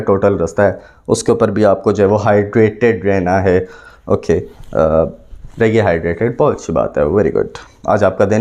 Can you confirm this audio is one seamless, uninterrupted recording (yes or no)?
yes